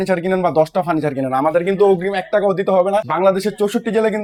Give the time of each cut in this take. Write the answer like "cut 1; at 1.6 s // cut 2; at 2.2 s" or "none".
none